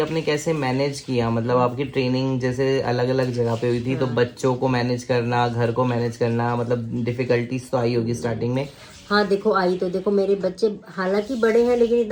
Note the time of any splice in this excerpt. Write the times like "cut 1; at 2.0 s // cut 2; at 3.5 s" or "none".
none